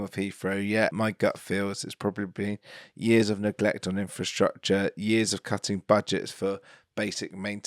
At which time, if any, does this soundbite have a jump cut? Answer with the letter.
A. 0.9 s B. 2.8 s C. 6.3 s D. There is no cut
A